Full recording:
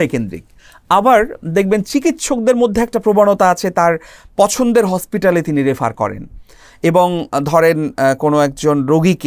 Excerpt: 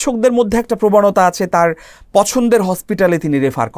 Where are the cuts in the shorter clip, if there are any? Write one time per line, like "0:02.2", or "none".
none

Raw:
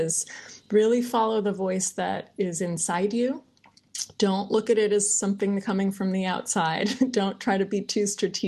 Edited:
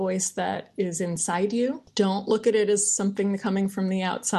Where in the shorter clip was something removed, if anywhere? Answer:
0:01.8

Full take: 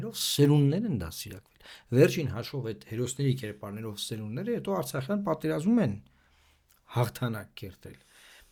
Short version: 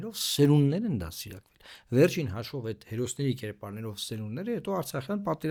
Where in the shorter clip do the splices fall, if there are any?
none

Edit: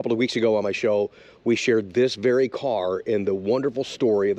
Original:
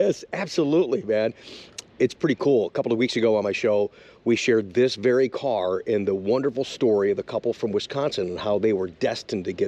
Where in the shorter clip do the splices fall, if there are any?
none

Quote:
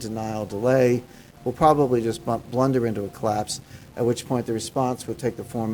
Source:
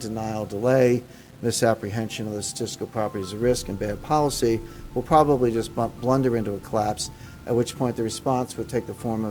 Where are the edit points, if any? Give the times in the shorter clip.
0:01.2

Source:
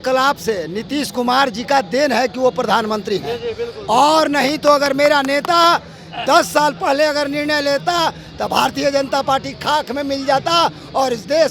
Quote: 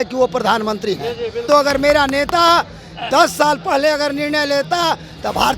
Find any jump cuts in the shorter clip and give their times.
0:01.4

